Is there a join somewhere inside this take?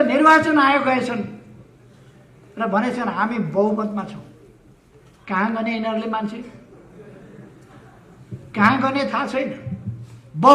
no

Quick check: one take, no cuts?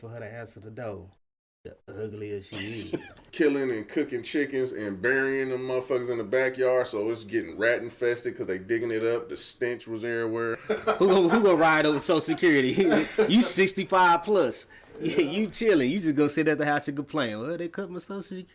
no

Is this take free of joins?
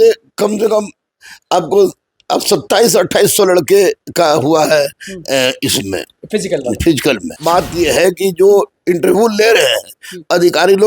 no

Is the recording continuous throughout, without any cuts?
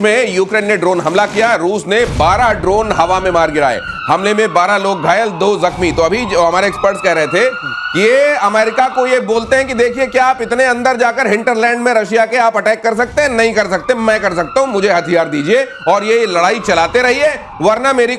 yes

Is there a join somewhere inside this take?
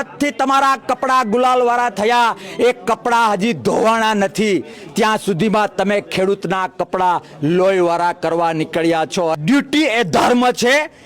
yes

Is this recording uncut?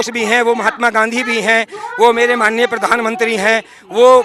yes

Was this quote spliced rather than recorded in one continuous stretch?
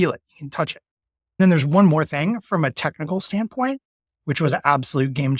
yes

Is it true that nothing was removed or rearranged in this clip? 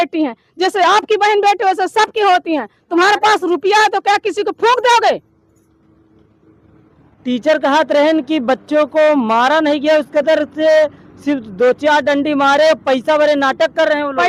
yes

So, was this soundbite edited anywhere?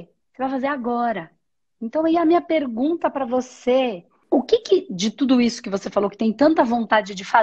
yes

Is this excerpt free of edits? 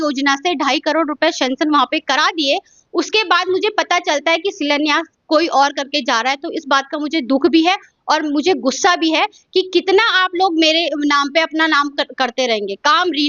yes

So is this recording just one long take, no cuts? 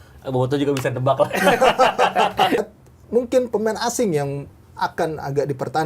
no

